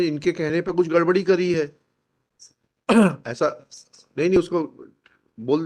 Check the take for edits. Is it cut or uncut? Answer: uncut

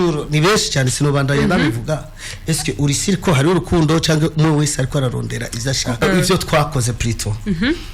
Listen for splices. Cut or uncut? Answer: cut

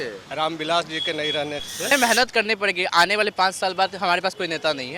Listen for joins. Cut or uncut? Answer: cut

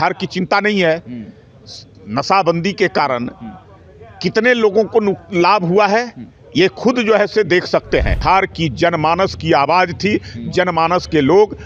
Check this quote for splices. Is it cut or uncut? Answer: cut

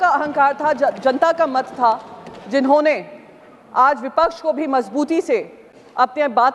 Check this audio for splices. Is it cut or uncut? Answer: uncut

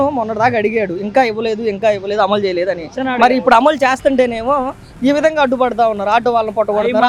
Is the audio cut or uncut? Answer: uncut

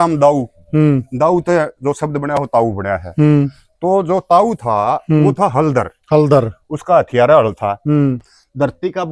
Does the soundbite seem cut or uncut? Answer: cut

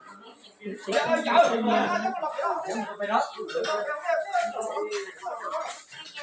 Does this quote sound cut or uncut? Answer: uncut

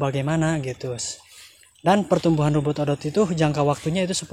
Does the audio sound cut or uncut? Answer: uncut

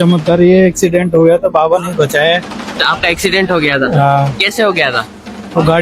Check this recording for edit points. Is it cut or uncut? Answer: uncut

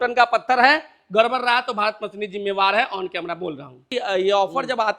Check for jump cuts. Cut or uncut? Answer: cut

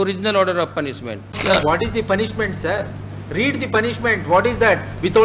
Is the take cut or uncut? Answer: cut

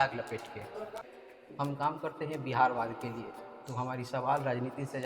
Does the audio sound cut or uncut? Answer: cut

